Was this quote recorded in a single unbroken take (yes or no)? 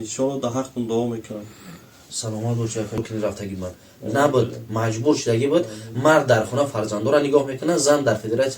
no